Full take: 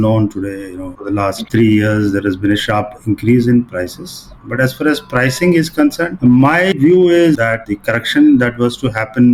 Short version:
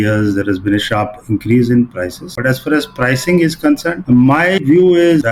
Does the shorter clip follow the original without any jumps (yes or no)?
no